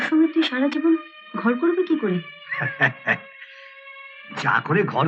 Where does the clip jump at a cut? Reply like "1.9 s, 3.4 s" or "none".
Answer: none